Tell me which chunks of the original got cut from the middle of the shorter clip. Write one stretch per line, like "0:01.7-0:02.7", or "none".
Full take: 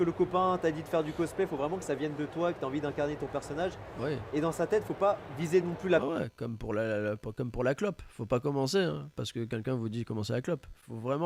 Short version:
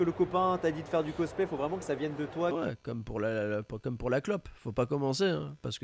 0:02.5-0:06.1